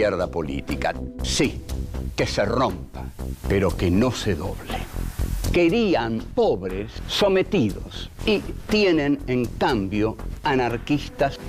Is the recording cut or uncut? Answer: uncut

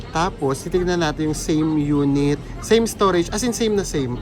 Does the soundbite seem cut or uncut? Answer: uncut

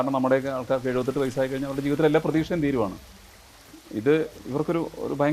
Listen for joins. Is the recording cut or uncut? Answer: uncut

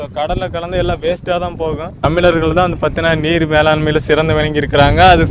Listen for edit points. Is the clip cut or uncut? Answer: cut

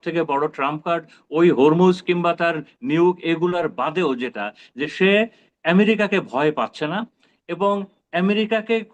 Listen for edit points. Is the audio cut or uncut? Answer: uncut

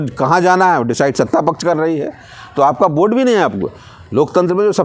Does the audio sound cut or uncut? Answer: uncut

